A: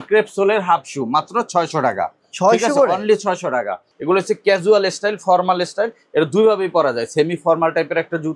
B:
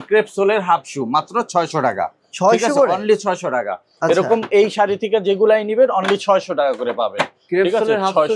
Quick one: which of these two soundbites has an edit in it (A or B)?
A